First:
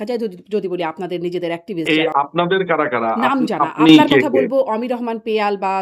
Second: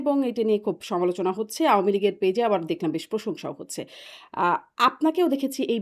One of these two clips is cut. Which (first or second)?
first